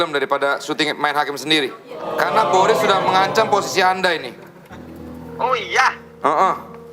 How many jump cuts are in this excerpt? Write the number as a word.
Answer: one